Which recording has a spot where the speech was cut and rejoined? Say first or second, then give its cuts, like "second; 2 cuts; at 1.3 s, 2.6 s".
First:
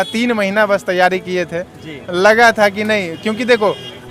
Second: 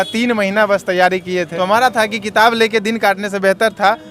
second; 1 cut; at 1.5 s